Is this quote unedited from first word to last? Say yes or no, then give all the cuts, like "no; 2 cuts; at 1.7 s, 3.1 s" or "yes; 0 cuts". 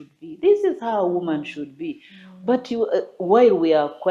yes; 0 cuts